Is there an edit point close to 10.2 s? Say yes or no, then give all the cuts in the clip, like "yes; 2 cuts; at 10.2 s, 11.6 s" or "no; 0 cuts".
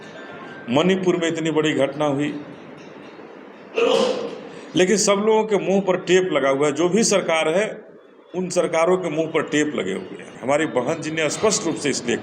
yes; 1 cut; at 10.2 s